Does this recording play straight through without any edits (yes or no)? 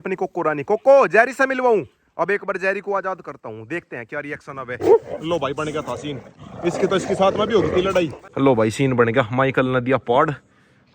no